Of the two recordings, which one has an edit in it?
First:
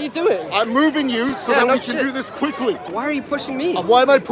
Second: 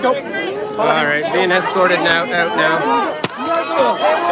first; 1 cut; at 2.9 s

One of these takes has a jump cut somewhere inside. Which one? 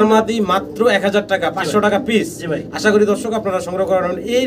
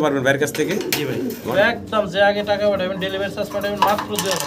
second; 1 cut; at 1.5 s

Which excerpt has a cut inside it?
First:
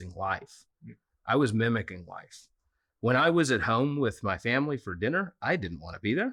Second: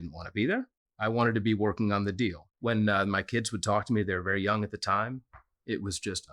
second; 1 cut; at 2.5 s

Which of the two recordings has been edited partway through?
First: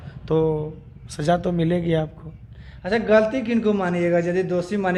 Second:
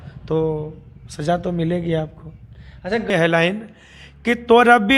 second; 1 cut; at 3.1 s

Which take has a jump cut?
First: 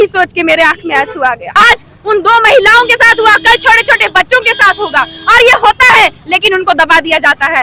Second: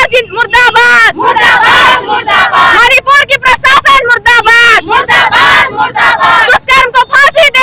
first; 1 cut; at 1.5 s

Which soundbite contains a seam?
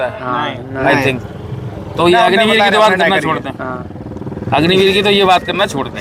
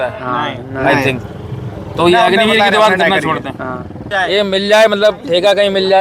second; 1 cut; at 4.1 s

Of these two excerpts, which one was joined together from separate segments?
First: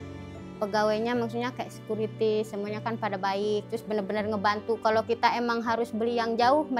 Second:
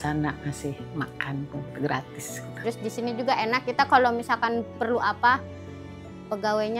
second; 1 cut; at 2.4 s

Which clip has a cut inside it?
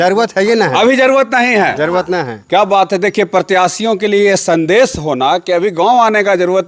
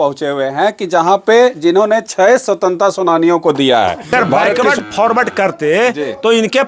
second; 1 cut; at 4.6 s

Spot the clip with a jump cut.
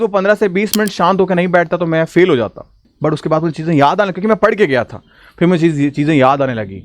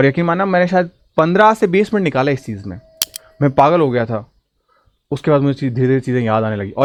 first; 1 cut; at 2.8 s

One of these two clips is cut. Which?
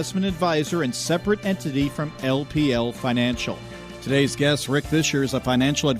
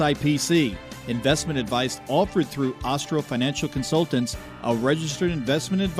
first; 1 cut; at 3.9 s

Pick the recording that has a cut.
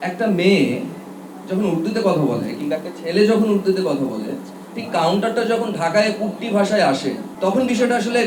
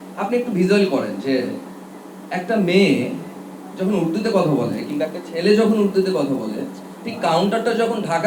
first; 1 cut; at 7.3 s

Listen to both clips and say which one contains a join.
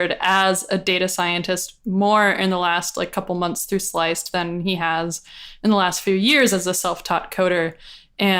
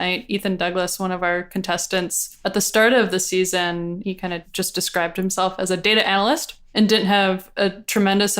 second; 3 cuts; at 2.2 s, 4.0 s, 6.6 s

